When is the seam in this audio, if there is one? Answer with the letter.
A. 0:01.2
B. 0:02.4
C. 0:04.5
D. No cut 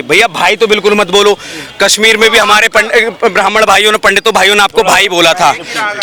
D